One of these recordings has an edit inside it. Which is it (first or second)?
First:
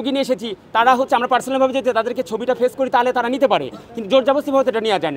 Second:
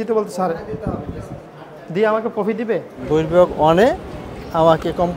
second